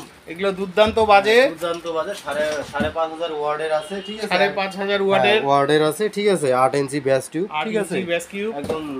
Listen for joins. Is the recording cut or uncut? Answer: uncut